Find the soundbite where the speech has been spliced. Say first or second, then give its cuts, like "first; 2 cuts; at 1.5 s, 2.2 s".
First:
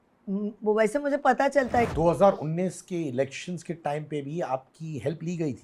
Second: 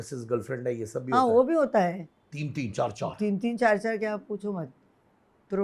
first; 1 cut; at 1.9 s